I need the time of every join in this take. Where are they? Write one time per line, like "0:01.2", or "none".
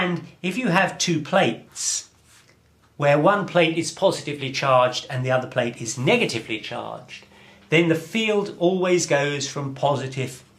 0:05.7